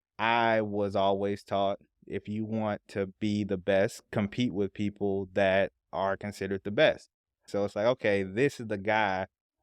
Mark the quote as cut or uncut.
cut